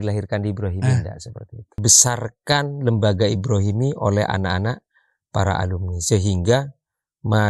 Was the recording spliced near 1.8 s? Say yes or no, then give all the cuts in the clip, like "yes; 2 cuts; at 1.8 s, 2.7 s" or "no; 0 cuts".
yes; 1 cut; at 1.8 s